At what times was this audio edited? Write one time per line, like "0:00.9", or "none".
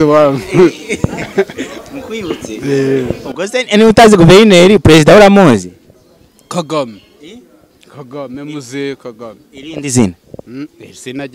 none